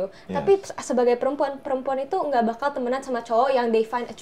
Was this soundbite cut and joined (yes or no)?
no